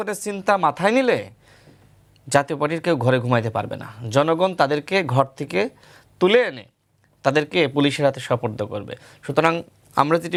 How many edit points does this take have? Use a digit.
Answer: 0